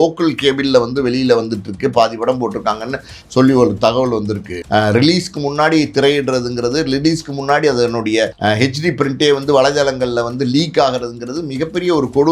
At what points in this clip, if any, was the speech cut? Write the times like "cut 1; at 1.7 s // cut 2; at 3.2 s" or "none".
cut 1; at 4.5 s // cut 2; at 8.3 s